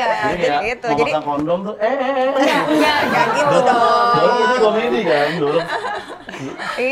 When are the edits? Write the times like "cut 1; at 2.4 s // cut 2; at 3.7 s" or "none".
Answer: none